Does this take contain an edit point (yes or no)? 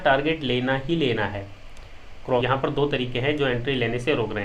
yes